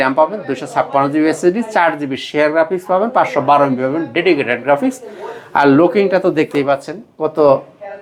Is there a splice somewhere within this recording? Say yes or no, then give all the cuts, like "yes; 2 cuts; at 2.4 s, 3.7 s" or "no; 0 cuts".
no; 0 cuts